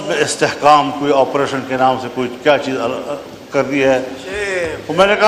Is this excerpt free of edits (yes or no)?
yes